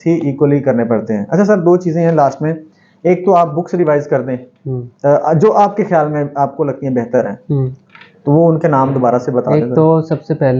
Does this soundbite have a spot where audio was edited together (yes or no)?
no